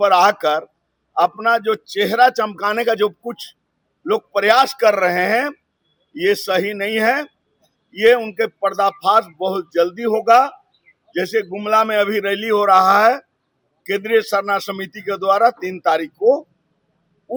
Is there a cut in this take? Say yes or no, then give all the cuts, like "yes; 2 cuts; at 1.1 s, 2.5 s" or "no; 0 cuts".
no; 0 cuts